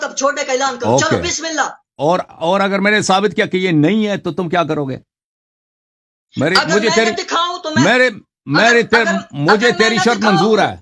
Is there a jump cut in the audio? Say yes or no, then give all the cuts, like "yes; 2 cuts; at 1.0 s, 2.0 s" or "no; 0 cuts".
no; 0 cuts